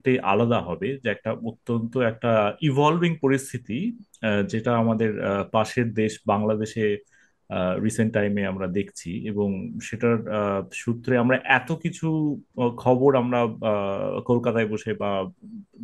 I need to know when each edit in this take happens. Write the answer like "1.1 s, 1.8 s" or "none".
none